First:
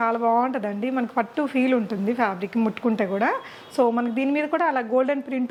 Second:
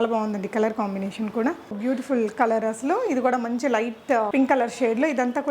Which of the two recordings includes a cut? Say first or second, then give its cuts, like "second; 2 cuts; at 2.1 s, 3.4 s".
second; 2 cuts; at 1.8 s, 4.3 s